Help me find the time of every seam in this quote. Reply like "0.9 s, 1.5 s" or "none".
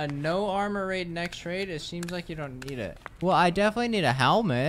3.0 s